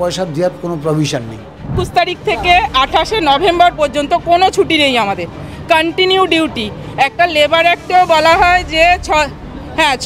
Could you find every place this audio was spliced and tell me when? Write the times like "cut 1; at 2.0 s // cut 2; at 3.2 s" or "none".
cut 1; at 1.8 s